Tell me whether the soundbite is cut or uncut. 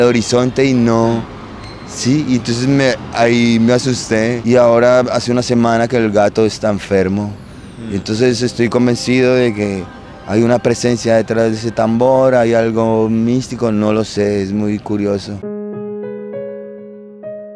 uncut